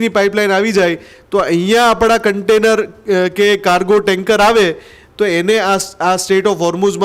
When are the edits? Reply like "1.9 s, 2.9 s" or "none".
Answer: none